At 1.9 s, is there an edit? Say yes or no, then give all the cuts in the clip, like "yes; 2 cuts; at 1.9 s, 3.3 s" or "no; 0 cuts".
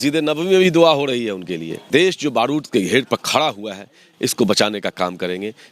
yes; 1 cut; at 1.9 s